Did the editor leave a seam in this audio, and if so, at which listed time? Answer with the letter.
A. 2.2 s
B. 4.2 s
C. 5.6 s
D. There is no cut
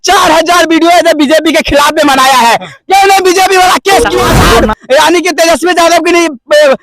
B